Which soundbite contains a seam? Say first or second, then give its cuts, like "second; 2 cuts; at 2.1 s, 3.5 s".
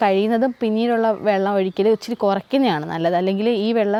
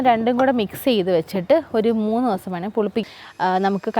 second; 1 cut; at 3.0 s